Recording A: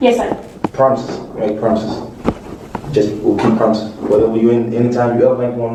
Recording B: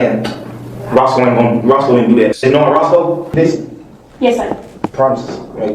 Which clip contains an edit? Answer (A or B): B